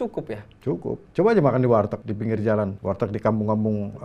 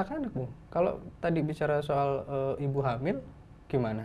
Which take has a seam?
first; 3 cuts; at 1.1 s, 2.0 s, 2.8 s

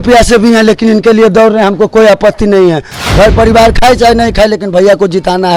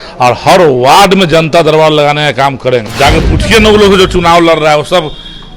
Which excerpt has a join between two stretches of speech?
second; 1 cut; at 2.9 s

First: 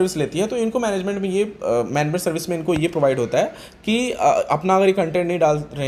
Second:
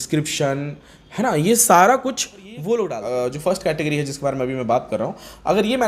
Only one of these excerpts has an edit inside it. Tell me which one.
second; 1 cut; at 3.0 s

